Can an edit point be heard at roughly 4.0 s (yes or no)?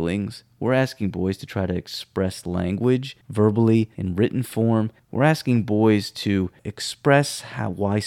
yes